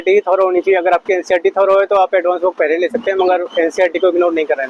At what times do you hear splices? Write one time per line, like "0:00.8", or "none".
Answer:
none